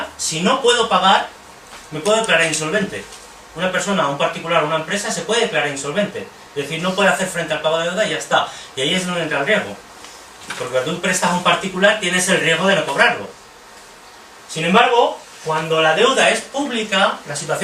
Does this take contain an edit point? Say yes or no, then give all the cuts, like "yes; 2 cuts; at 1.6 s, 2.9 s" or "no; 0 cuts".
yes; 1 cut; at 7.6 s